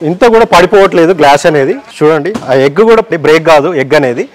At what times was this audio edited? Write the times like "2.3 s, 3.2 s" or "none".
1.8 s, 3.1 s